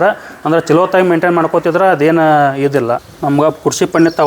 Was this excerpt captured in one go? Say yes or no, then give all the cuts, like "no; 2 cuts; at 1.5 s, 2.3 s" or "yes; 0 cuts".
no; 1 cut; at 3.1 s